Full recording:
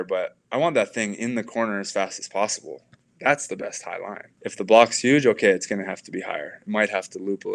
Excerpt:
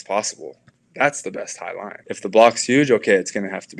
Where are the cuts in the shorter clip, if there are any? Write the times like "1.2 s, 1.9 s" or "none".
2.0 s